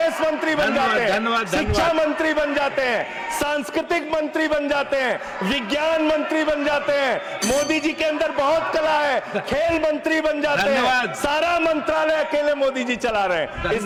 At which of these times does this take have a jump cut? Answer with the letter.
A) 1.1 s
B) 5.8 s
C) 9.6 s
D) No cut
D